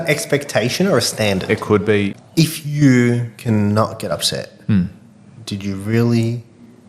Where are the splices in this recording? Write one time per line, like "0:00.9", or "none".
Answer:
0:02.1